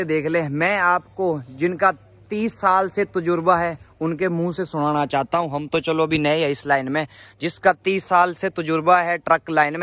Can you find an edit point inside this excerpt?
no; 0 cuts

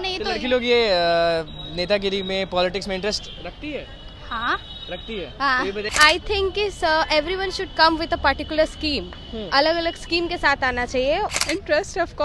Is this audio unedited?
no; 2 cuts; at 5.9 s, 11.3 s

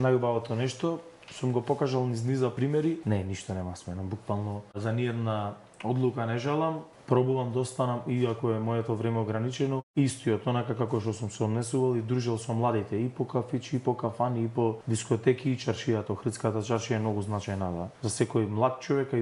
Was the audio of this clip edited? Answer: yes; 6 cuts; at 2.7 s, 4.8 s, 6.9 s, 9.9 s, 14.8 s, 17.9 s

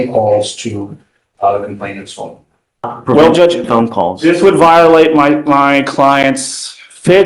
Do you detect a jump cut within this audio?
yes; 1 cut; at 2.9 s

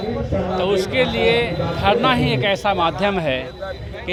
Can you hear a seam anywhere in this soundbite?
no; 0 cuts

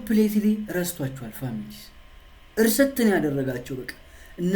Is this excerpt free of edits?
yes; 0 cuts

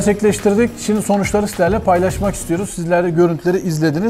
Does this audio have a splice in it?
no; 0 cuts

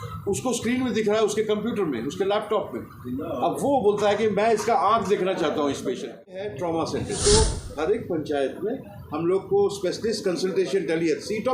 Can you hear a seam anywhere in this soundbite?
yes; 1 cut; at 6.5 s

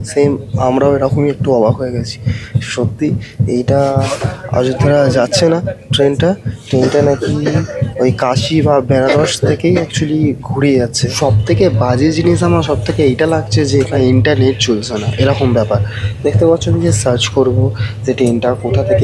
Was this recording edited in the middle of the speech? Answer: no; 0 cuts

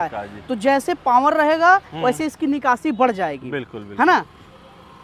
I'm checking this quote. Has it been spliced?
no; 0 cuts

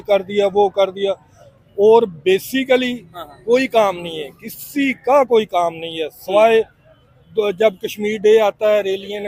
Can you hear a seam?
no; 0 cuts

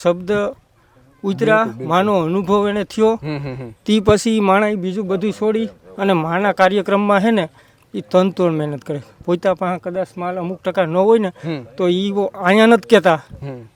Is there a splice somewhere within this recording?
no; 0 cuts

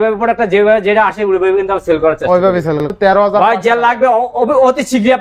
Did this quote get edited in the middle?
yes; 1 cut; at 2.9 s

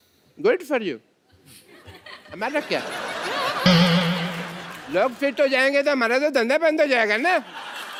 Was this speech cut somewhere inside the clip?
no; 0 cuts

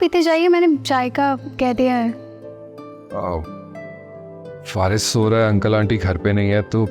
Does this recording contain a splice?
no; 0 cuts

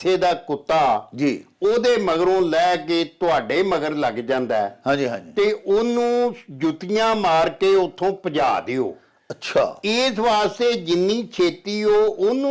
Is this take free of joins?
yes; 0 cuts

